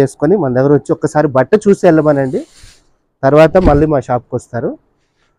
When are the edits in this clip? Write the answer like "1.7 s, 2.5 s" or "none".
none